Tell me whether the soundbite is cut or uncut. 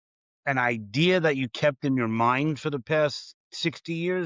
uncut